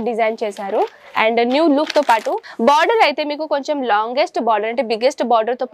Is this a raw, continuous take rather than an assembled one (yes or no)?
no